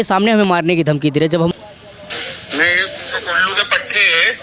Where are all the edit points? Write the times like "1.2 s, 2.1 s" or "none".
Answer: 1.5 s